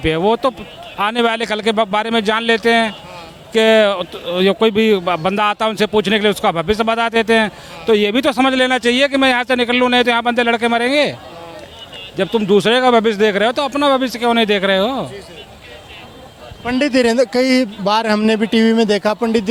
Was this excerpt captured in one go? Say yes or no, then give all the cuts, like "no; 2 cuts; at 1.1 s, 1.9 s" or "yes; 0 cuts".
yes; 0 cuts